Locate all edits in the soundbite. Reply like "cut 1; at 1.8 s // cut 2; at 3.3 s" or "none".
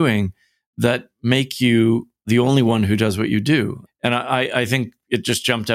cut 1; at 2.2 s // cut 2; at 3.8 s